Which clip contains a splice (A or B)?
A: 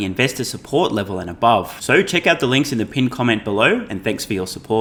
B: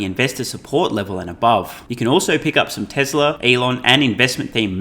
B